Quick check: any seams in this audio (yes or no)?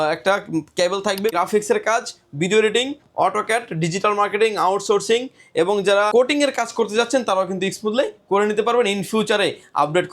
yes